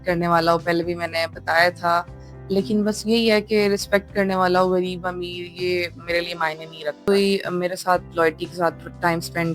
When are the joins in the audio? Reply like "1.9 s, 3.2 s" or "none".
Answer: 7.1 s